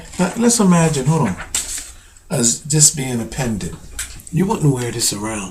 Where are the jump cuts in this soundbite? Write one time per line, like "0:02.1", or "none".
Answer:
0:02.6